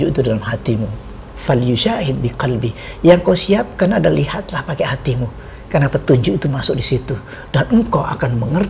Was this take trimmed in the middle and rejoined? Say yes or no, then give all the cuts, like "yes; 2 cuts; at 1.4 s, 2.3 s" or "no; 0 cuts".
no; 0 cuts